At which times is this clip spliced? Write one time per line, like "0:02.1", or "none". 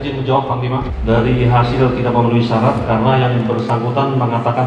0:00.9